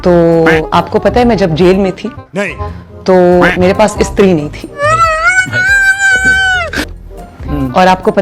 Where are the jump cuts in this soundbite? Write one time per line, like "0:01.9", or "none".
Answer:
0:07.0

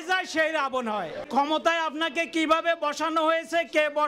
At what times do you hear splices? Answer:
0:01.3

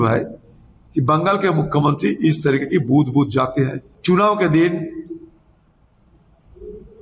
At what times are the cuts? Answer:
0:03.9

